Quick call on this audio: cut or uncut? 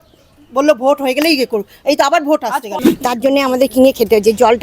cut